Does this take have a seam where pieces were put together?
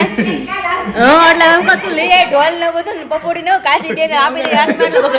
no; 0 cuts

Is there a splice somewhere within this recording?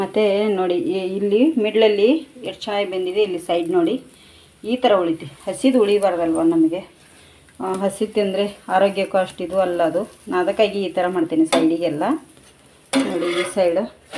no; 0 cuts

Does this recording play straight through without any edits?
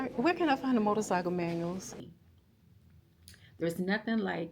no; 1 cut; at 2.0 s

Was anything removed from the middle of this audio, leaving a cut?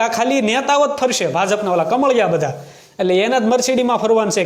no; 0 cuts

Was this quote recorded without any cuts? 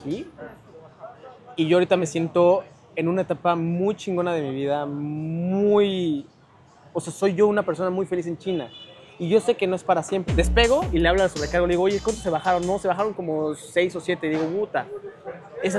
no; 1 cut; at 10.2 s

